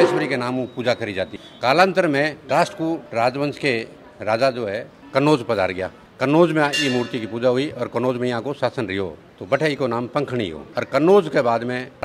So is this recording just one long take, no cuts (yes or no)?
yes